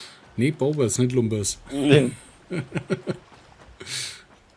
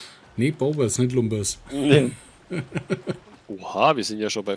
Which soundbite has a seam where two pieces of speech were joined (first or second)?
second